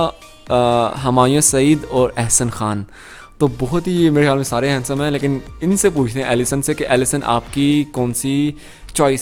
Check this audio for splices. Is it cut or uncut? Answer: uncut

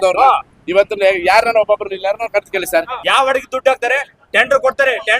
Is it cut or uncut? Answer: cut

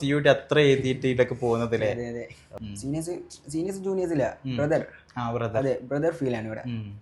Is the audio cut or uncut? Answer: cut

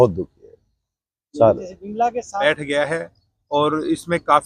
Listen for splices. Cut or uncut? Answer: cut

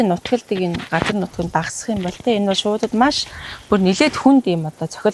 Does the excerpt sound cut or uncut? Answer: uncut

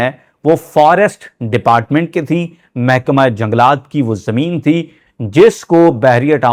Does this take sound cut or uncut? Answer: uncut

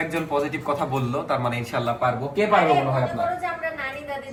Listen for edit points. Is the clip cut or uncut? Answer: uncut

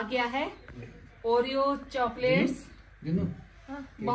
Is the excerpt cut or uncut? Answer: uncut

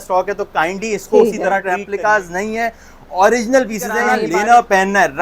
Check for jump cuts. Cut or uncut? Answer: cut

